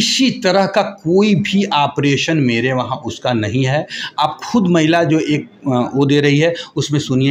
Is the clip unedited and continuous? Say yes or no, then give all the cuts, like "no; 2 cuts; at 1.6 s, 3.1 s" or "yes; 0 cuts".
yes; 0 cuts